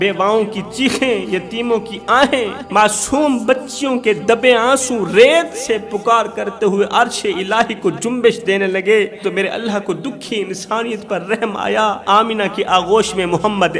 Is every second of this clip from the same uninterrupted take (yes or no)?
no